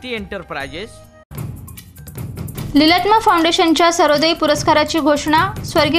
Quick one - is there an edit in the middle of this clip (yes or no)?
yes